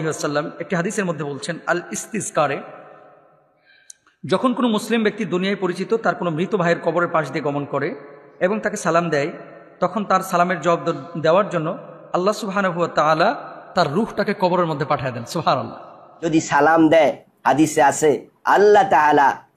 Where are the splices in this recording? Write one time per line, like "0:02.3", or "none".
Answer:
0:16.1